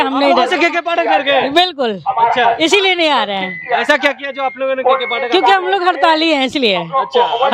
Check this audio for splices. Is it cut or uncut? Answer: uncut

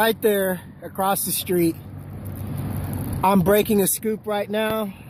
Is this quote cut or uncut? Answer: uncut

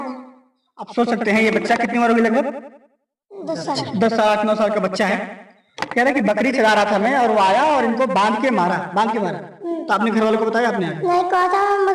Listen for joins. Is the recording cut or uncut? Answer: uncut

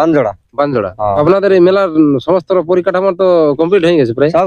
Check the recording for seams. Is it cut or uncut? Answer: cut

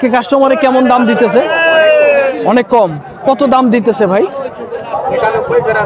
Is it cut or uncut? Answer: uncut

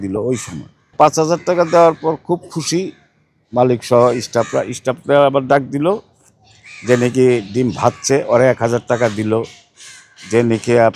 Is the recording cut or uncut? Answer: cut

